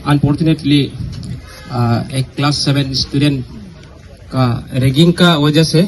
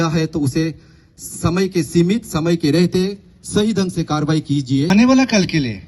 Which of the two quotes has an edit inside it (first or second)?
second